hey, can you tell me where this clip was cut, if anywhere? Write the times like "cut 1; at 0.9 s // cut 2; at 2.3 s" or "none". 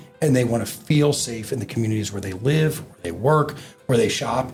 none